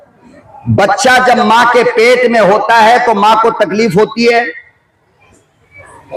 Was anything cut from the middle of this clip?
no; 0 cuts

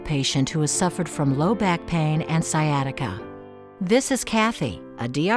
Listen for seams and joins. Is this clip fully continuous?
no; 1 cut; at 3.2 s

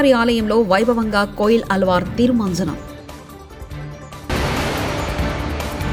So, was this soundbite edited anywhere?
no; 0 cuts

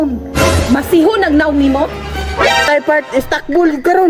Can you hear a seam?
no; 0 cuts

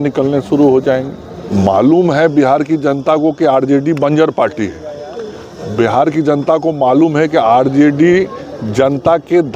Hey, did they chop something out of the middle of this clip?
yes; 1 cut; at 1.4 s

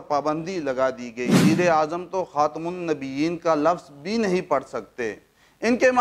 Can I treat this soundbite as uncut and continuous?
no; 1 cut; at 1.4 s

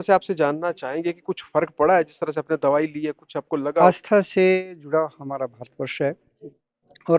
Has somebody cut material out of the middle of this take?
yes; 1 cut; at 3.8 s

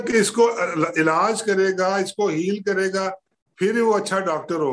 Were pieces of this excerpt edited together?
no; 0 cuts

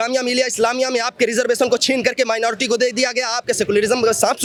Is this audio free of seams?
yes; 0 cuts

